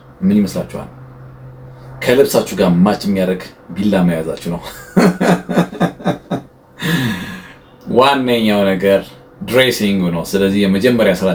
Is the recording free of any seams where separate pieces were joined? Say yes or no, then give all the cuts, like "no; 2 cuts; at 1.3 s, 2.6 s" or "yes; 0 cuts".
yes; 0 cuts